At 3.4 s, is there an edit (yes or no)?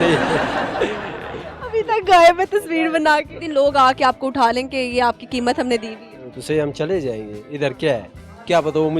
yes